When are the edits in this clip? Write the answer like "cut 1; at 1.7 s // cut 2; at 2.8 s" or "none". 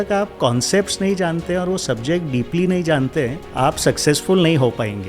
cut 1; at 3.4 s